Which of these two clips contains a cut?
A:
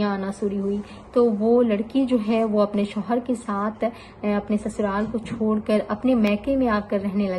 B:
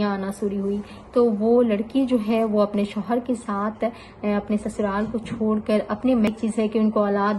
B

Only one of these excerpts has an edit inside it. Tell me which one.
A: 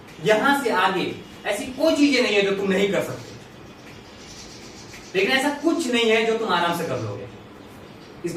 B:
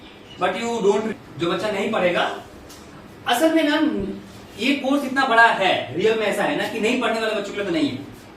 B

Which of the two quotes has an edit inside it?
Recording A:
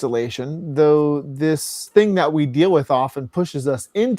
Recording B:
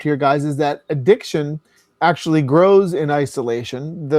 A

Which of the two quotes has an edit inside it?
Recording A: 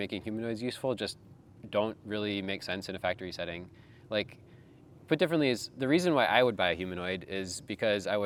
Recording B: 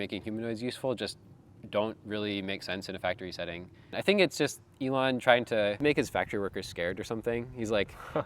B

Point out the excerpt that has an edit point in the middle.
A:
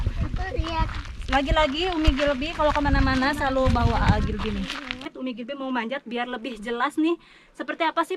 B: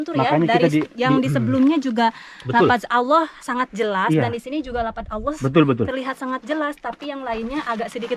A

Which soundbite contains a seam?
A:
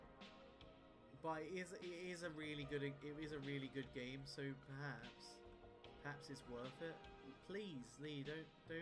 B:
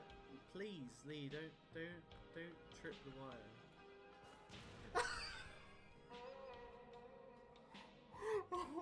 A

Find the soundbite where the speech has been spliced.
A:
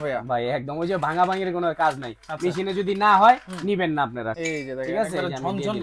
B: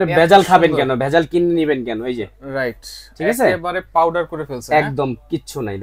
A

